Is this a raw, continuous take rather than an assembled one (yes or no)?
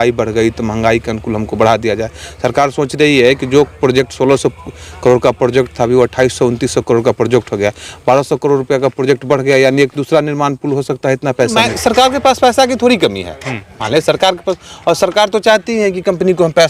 no